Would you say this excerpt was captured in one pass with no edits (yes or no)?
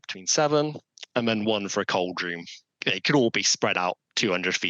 no